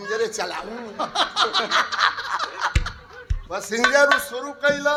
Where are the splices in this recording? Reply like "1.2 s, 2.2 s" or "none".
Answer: none